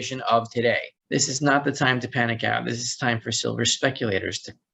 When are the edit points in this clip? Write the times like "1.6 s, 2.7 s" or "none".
0.9 s